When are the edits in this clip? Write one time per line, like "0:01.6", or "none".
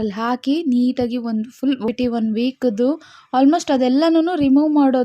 0:01.9